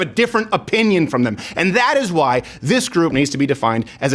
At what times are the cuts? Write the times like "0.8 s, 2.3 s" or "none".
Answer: 1.4 s